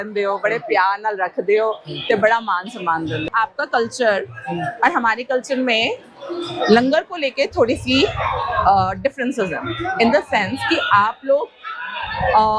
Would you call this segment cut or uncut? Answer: cut